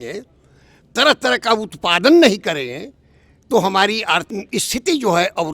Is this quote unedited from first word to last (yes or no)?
no